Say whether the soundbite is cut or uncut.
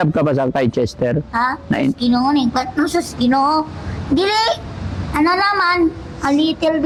uncut